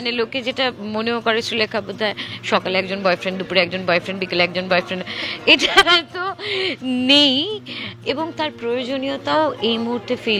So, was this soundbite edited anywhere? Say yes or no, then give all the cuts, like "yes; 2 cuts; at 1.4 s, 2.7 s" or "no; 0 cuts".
no; 0 cuts